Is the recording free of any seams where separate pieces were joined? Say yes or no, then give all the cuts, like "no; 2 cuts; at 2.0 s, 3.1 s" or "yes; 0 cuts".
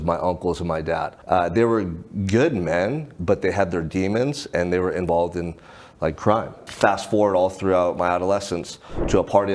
no; 2 cuts; at 1.1 s, 6.7 s